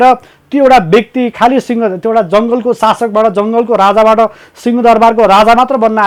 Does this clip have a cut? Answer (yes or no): no